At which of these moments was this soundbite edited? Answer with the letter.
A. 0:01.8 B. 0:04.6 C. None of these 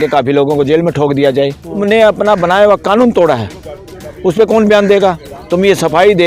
A